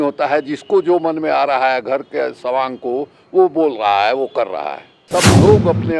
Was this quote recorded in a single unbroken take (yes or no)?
no